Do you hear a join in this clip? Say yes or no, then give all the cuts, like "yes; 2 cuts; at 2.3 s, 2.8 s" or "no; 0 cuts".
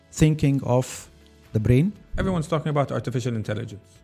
yes; 1 cut; at 2.1 s